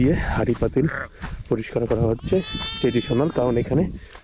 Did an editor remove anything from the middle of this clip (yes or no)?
no